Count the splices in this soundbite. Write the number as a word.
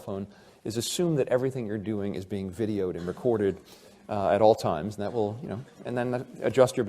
one